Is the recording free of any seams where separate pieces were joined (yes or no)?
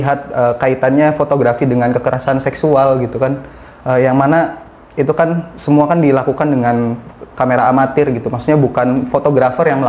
yes